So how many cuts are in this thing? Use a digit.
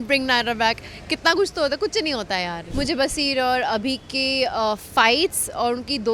1